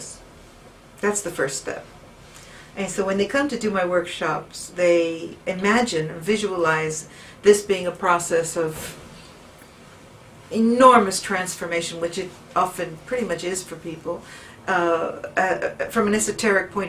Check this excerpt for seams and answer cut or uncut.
uncut